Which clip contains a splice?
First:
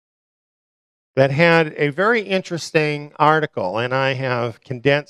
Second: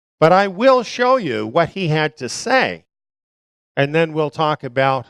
first; 1 cut; at 2.6 s

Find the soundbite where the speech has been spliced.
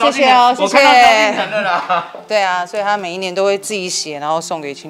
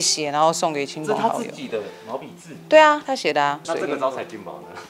second; 1 cut; at 3.6 s

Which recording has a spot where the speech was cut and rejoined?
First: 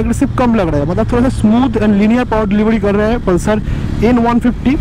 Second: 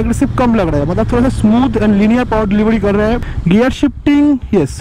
second; 1 cut; at 3.2 s

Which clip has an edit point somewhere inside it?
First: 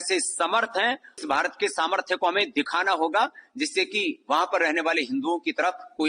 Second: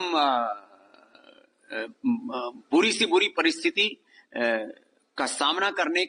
first; 1 cut; at 1.2 s

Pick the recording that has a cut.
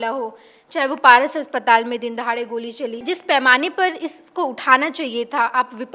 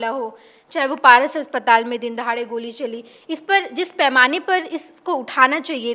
first; 1 cut; at 3.0 s

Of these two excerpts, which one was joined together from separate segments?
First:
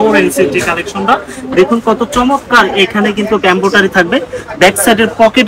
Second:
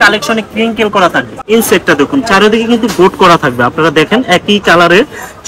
second; 1 cut; at 1.4 s

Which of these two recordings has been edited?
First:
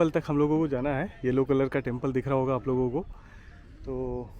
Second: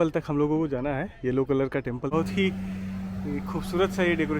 second; 1 cut; at 2.1 s

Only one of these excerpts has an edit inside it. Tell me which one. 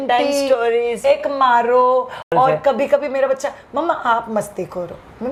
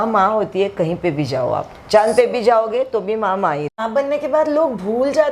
second; 1 cut; at 3.7 s

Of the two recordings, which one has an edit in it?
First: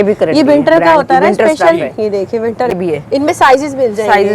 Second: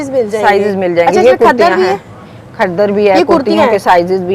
first; 1 cut; at 2.7 s

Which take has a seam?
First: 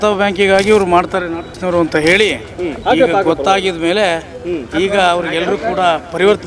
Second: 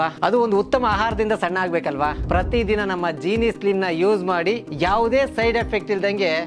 first; 2 cuts; at 1.5 s, 2.6 s

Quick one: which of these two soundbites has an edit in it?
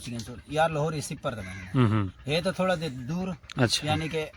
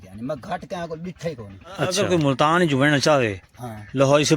second; 1 cut; at 1.9 s

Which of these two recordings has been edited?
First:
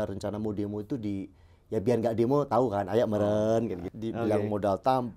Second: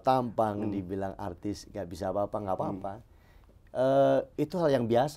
first; 1 cut; at 3.8 s

